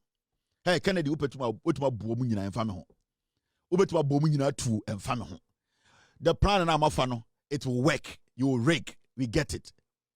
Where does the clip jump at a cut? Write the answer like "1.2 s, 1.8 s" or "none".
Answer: none